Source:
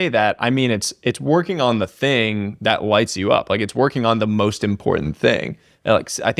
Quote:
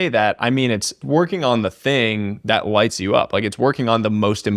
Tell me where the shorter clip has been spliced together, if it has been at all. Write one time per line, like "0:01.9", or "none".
0:01.0